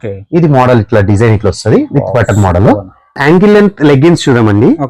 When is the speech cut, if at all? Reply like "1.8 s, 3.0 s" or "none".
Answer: 3.2 s